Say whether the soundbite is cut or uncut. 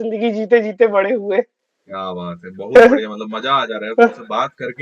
uncut